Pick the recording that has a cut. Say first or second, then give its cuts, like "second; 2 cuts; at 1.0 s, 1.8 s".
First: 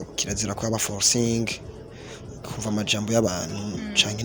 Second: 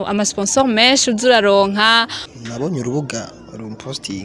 second; 1 cut; at 2.3 s